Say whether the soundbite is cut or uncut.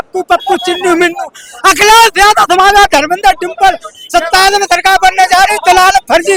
uncut